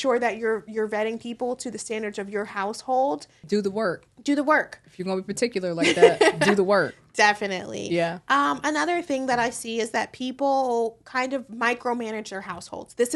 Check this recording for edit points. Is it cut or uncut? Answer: cut